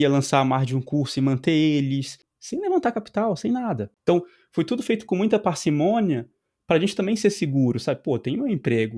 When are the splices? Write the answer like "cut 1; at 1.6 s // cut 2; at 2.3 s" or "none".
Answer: cut 1; at 2.3 s // cut 2; at 3.9 s